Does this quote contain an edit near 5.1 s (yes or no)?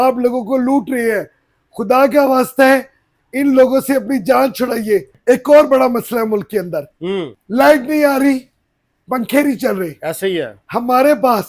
yes